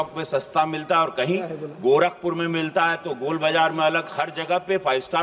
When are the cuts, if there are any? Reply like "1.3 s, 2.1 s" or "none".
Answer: none